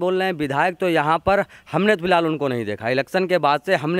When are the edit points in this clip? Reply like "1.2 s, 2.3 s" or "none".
none